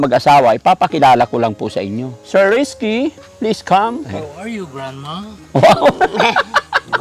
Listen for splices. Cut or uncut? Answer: cut